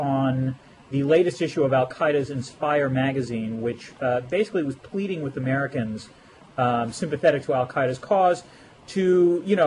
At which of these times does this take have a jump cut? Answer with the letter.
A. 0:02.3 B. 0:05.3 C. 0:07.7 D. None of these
A